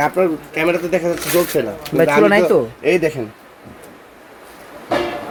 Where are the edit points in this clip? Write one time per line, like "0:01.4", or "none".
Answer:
none